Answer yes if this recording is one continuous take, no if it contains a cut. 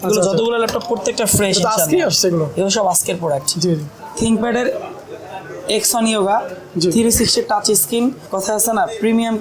no